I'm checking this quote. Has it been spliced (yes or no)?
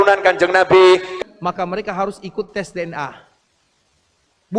yes